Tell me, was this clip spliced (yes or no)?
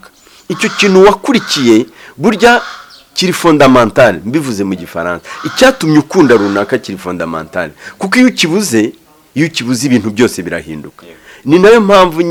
no